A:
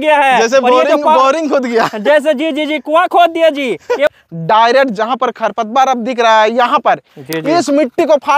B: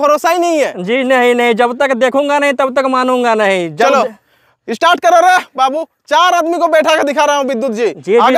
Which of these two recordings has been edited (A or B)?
A